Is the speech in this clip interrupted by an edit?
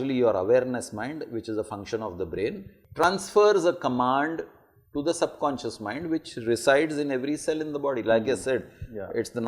yes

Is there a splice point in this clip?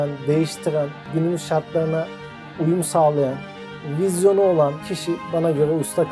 yes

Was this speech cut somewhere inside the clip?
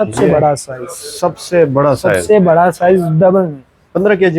no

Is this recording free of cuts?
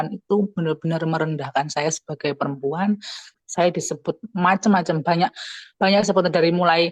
no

